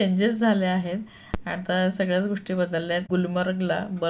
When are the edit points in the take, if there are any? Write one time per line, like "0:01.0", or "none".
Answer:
0:03.1